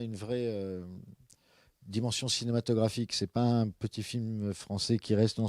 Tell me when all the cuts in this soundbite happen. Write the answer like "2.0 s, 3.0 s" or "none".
none